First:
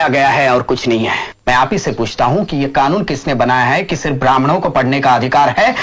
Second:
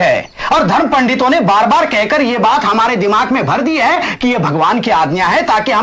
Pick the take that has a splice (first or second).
first